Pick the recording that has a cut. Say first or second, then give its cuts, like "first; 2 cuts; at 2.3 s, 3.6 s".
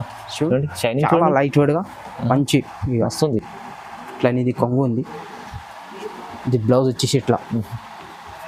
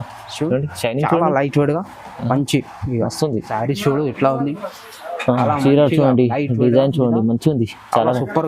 second; 1 cut; at 3.5 s